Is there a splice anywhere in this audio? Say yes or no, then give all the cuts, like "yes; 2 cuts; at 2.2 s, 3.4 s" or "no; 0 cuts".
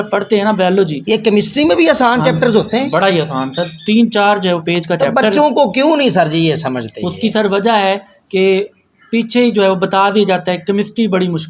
no; 0 cuts